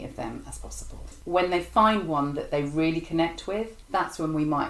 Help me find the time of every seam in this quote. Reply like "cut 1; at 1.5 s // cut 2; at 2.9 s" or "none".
cut 1; at 1.2 s